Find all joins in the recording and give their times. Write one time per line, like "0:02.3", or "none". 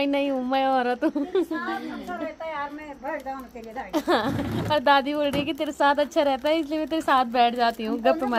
none

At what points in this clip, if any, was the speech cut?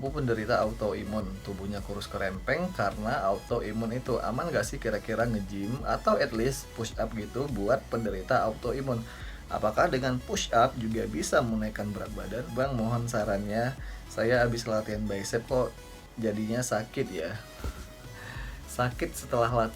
0:12.5

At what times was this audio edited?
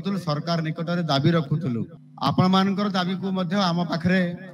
0:02.0

